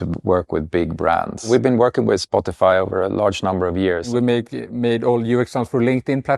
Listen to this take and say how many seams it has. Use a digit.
2